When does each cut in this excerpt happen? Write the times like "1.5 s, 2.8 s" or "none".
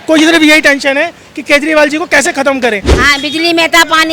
2.9 s